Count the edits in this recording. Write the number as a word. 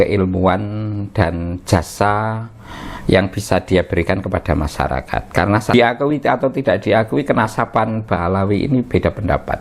one